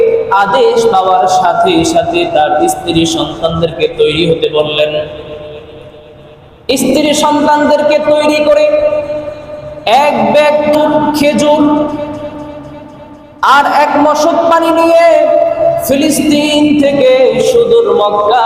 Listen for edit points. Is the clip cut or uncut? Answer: cut